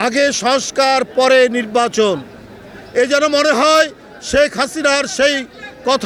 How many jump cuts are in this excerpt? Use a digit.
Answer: 0